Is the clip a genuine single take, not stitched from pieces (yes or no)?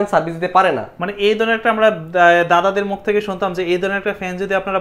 yes